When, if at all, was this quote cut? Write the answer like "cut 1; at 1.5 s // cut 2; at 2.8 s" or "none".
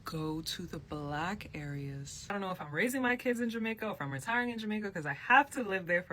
cut 1; at 2.3 s